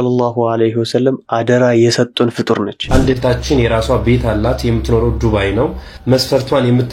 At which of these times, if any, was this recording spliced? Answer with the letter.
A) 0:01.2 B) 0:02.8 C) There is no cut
B